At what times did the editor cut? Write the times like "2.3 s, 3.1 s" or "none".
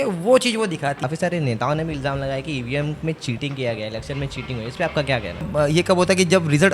1.1 s, 5.5 s